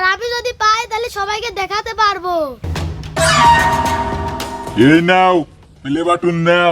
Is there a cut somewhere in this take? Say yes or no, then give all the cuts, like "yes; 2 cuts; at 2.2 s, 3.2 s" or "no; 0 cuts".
yes; 1 cut; at 2.7 s